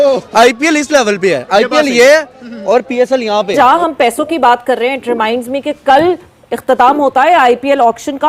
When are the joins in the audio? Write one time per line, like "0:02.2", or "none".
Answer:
0:03.5

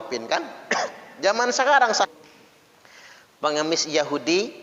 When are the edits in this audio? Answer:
0:02.1

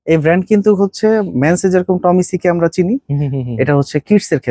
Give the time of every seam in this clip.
none

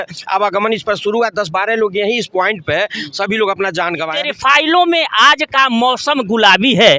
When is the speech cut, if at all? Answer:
0:04.2

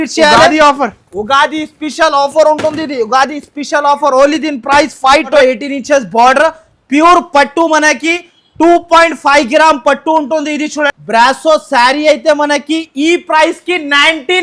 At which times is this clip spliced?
0:05.3
0:11.0

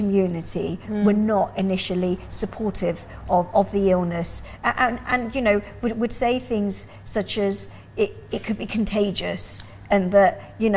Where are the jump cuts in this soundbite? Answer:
none

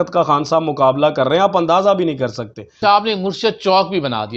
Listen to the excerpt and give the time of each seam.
0:02.8

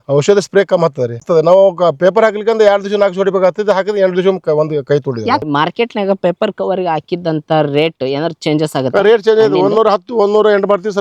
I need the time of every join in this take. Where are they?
0:01.2
0:05.4

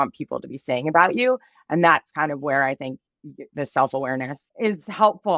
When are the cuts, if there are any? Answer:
0:04.4

